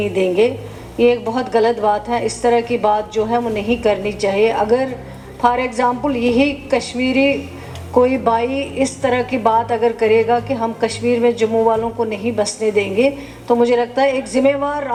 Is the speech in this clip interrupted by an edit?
no; 0 cuts

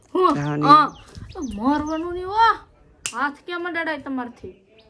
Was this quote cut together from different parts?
no; 0 cuts

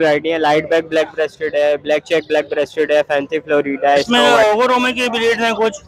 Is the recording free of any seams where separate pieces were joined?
no; 1 cut; at 4.1 s

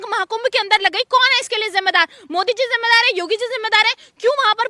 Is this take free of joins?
yes; 0 cuts

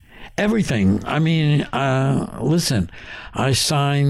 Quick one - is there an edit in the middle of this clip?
no; 0 cuts

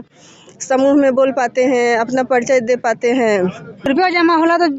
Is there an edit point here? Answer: yes; 1 cut; at 3.9 s

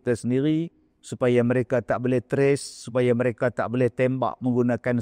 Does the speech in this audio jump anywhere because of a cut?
no; 0 cuts

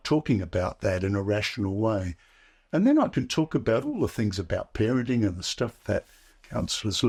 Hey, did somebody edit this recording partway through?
no; 0 cuts

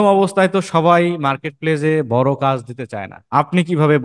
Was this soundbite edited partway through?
no; 0 cuts

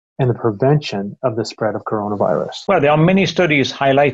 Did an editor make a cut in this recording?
yes; 1 cut; at 2.6 s

